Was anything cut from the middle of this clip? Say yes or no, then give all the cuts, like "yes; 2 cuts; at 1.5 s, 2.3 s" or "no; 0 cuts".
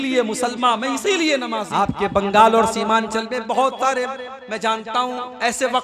yes; 1 cut; at 1.7 s